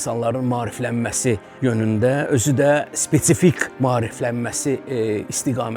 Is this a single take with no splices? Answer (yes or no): no